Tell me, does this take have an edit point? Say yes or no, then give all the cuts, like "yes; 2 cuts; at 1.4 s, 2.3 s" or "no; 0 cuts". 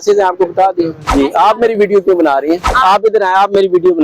yes; 2 cuts; at 1.0 s, 2.7 s